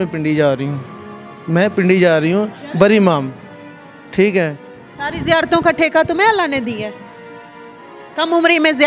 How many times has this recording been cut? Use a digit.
0